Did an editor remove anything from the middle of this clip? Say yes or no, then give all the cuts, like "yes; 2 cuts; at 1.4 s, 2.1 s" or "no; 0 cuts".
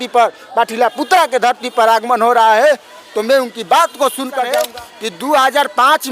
yes; 1 cut; at 4.5 s